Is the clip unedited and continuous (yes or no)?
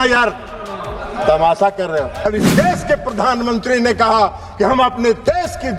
no